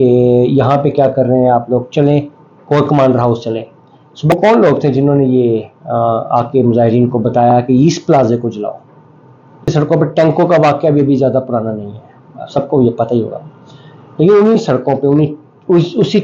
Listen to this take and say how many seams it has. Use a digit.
2